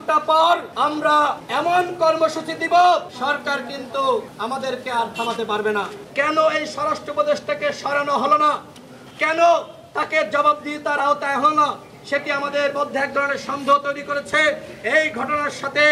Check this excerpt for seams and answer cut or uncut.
cut